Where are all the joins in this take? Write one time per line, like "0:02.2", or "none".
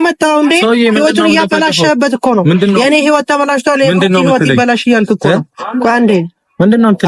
none